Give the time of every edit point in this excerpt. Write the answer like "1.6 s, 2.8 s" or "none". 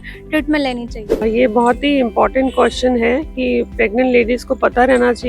1.2 s

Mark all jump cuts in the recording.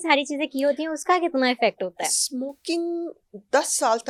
none

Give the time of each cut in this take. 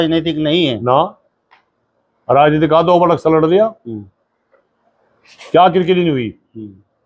none

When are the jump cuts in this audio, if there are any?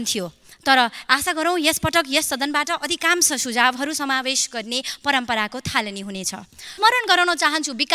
6.8 s

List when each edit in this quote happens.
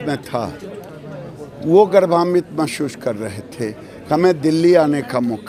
none

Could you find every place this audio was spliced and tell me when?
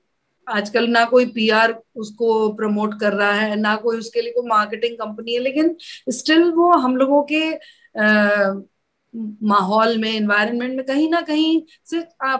none

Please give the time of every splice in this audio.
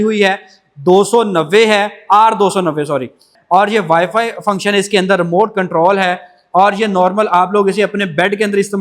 3.3 s

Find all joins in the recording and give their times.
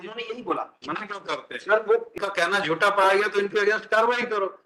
2.2 s

